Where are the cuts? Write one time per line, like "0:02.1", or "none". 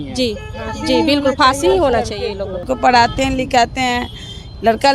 0:02.6